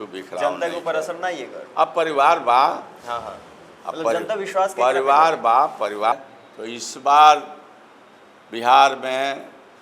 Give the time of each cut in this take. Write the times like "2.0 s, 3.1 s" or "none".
6.1 s